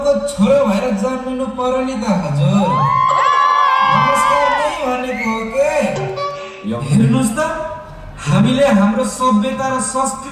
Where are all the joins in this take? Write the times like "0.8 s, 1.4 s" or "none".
6.5 s